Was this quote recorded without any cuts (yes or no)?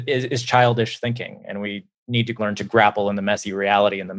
no